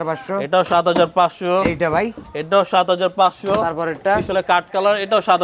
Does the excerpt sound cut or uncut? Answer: uncut